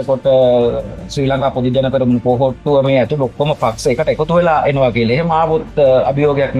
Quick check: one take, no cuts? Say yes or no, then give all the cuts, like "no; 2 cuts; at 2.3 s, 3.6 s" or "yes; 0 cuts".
yes; 0 cuts